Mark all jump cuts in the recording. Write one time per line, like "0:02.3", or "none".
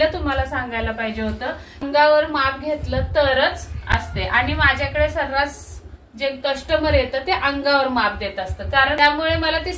0:01.8
0:09.0